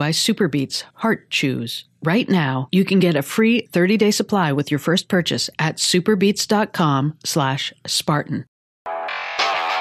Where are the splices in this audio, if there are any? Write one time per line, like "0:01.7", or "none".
0:08.8

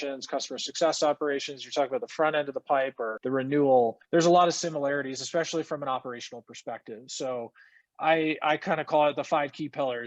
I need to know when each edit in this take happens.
0:03.1
0:04.0

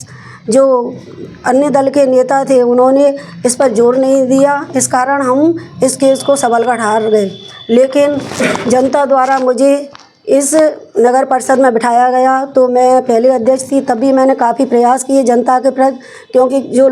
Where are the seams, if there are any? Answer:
none

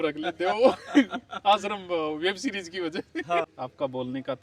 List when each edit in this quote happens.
0:03.5

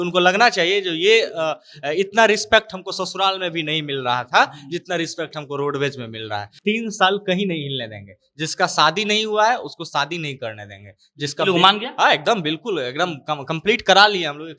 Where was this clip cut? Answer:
0:06.5

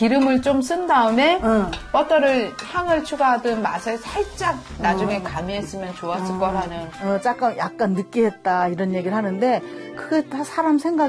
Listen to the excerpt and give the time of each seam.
0:06.9

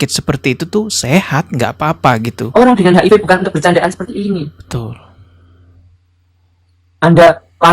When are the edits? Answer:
0:02.5

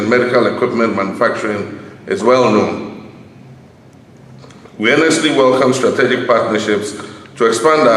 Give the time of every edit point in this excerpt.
none

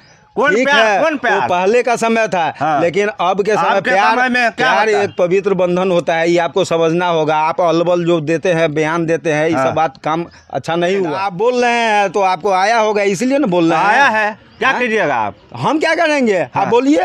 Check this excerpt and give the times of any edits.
0:11.2

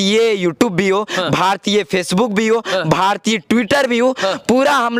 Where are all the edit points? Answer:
none

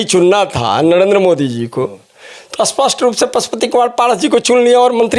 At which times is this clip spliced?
none

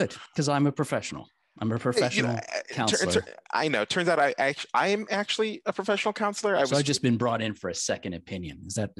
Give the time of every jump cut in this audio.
0:06.7

